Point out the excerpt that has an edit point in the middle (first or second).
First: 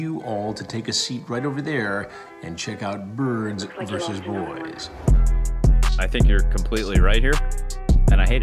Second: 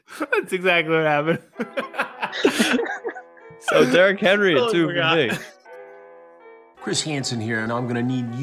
second